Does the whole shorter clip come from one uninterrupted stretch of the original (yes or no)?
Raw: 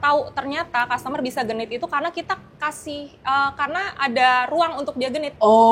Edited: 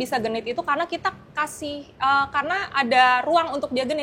yes